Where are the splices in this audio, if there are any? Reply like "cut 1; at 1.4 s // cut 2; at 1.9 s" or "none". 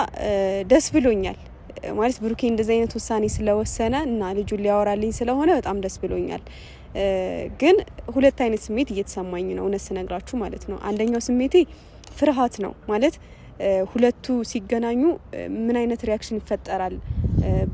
none